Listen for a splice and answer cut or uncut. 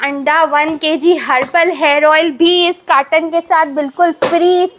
uncut